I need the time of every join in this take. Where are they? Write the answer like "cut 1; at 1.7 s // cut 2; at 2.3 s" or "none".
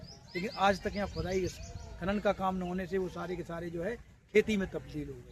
none